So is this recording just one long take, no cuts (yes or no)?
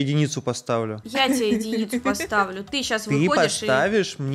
yes